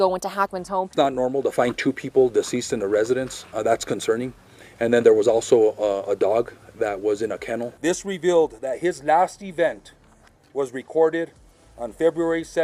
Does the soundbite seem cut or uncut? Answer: cut